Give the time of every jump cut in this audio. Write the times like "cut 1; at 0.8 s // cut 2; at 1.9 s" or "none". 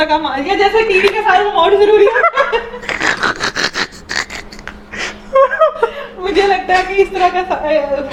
none